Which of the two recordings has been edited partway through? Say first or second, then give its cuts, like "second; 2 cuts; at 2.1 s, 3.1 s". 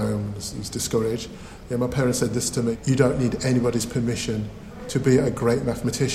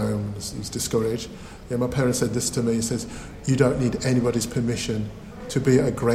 first; 1 cut; at 2.7 s